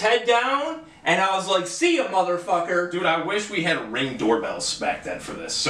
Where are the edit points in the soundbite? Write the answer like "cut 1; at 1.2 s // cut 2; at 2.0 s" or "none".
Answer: none

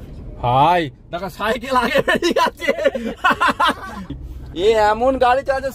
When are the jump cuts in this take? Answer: cut 1; at 4.1 s

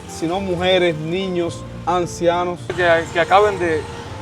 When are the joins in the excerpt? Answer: cut 1; at 2.8 s

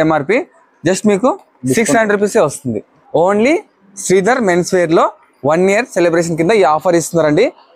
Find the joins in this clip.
cut 1; at 2.9 s

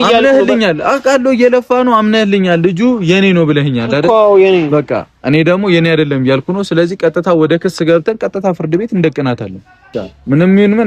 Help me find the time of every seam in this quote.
cut 1; at 9.9 s

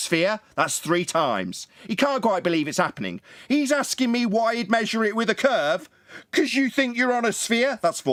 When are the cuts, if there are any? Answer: none

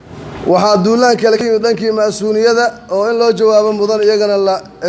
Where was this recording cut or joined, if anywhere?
cut 1; at 1.4 s

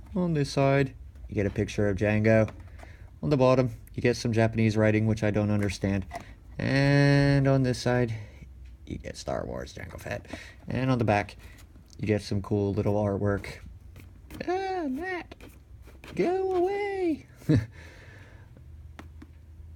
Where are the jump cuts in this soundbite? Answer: cut 1; at 9.0 s

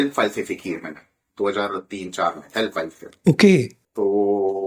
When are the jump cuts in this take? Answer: none

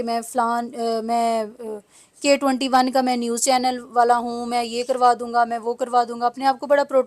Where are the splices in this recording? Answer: none

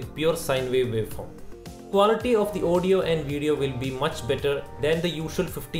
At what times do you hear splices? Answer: cut 1; at 1.9 s

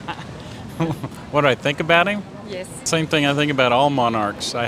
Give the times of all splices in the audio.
cut 1; at 2.8 s

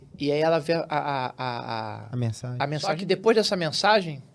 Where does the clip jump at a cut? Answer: cut 1; at 3.0 s

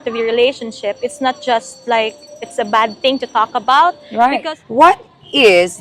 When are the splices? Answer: cut 1; at 4.4 s

